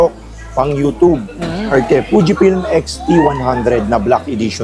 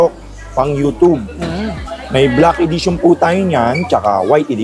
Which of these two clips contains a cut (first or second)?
first